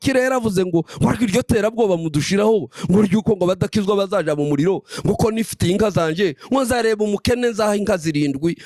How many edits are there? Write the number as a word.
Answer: zero